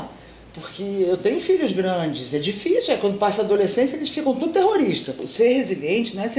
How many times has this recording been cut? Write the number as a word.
one